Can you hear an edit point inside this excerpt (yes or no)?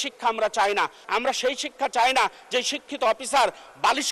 yes